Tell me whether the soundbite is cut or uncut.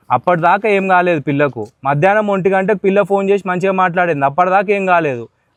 uncut